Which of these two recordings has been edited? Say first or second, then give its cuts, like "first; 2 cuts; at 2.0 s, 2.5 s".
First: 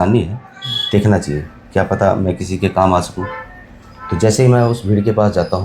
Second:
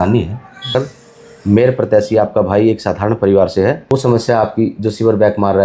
second; 2 cuts; at 0.7 s, 3.8 s